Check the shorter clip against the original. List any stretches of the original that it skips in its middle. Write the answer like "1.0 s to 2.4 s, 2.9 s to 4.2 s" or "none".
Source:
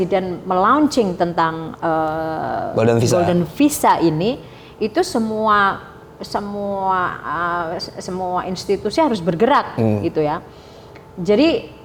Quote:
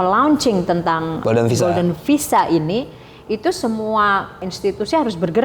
1.7 s to 2.7 s, 6.0 s to 8.5 s